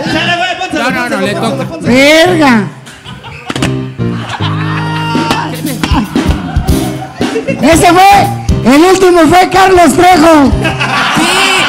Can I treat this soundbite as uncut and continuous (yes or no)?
yes